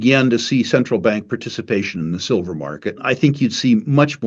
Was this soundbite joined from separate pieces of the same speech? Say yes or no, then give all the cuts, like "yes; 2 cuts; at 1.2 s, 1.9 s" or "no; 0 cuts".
yes; 1 cut; at 3.0 s